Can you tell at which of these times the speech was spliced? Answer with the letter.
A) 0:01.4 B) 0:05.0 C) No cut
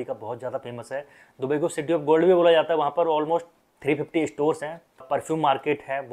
B